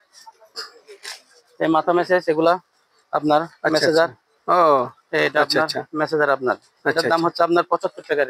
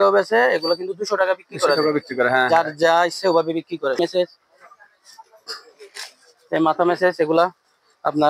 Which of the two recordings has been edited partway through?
second; 1 cut; at 4.0 s

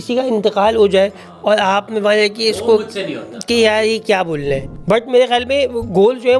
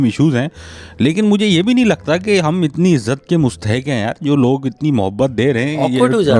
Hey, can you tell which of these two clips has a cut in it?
first; 1 cut; at 4.6 s

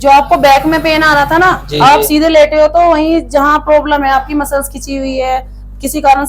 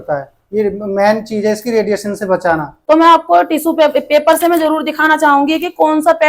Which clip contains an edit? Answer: second; 1 cut; at 2.7 s

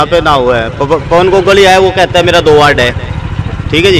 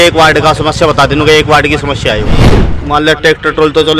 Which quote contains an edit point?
second; 1 cut; at 2.7 s

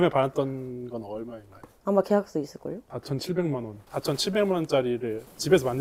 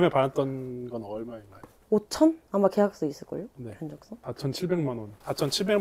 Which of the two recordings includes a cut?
first; 2 cuts; at 1.8 s, 2.9 s

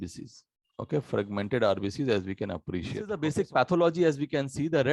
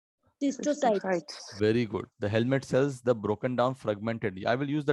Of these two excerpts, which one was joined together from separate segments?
first; 1 cut; at 3.2 s

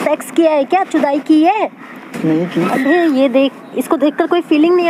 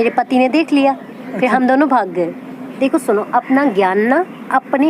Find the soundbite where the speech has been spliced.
second; 1 cut; at 2.7 s

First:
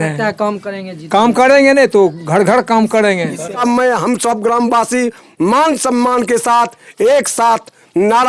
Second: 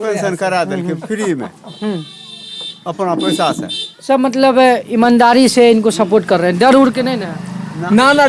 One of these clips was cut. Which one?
first; 1 cut; at 3.5 s

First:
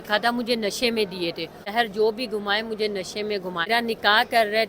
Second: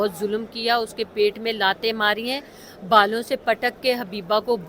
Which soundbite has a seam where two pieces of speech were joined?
first; 2 cuts; at 1.7 s, 3.7 s

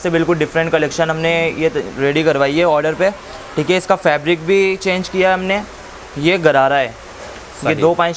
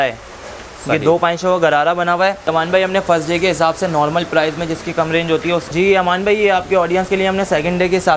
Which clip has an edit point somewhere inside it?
second; 2 cuts; at 2.4 s, 5.6 s

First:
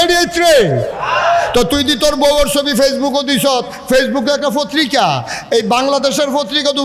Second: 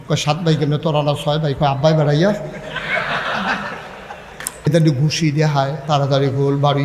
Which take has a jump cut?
second; 1 cut; at 4.7 s

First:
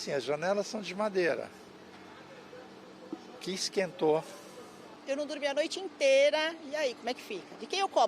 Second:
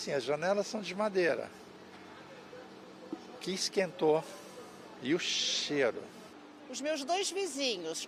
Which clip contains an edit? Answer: first; 1 cut; at 4.8 s

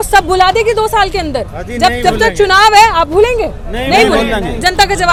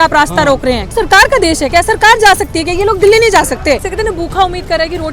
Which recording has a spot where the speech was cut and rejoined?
second; 2 cuts; at 0.9 s, 3.8 s

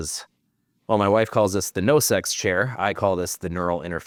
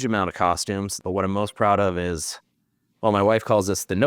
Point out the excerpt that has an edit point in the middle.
second; 1 cut; at 1.0 s

